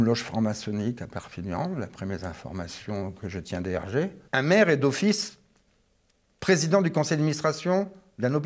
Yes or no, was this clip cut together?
yes